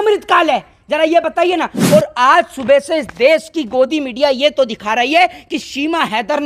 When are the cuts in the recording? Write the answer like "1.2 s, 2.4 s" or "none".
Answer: none